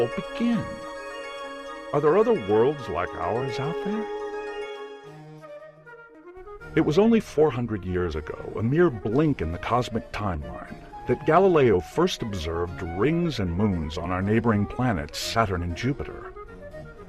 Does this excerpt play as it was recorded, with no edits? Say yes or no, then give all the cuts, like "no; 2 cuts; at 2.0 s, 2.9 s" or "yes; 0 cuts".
yes; 0 cuts